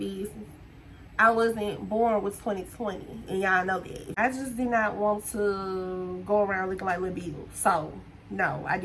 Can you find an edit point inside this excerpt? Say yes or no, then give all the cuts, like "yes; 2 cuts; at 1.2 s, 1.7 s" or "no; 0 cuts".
yes; 1 cut; at 4.1 s